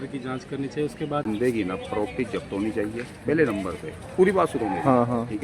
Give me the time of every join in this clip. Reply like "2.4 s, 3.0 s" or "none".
1.3 s